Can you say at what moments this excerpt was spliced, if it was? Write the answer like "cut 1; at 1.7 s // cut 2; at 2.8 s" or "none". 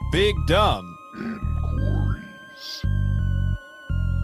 none

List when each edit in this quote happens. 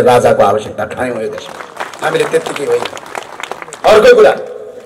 none

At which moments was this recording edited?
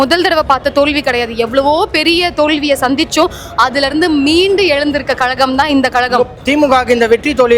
cut 1; at 6.3 s

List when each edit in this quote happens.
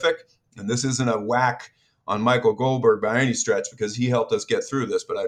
none

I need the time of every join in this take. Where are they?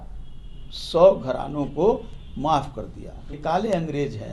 cut 1; at 3.4 s

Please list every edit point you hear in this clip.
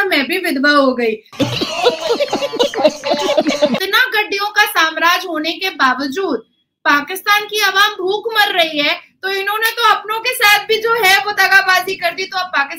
cut 1; at 1.3 s // cut 2; at 3.8 s

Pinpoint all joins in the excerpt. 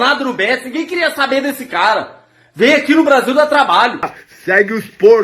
cut 1; at 4.1 s

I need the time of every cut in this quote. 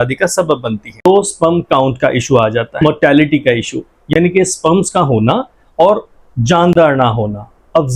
cut 1; at 1.1 s // cut 2; at 2.8 s

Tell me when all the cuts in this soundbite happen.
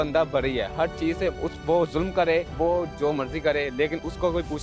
cut 1; at 2.5 s

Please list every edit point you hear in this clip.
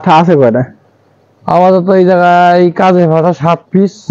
none

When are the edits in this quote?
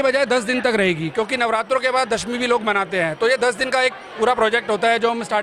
none

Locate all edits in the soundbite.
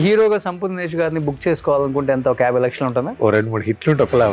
cut 1; at 3.1 s

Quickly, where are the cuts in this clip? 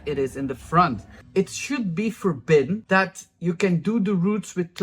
cut 1; at 1.1 s // cut 2; at 2.8 s

